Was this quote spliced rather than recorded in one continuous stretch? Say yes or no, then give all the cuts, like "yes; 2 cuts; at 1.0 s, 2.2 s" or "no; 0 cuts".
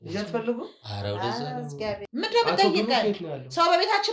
yes; 1 cut; at 2.0 s